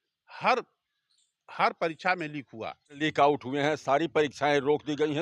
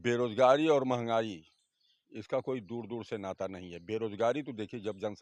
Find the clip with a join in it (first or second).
first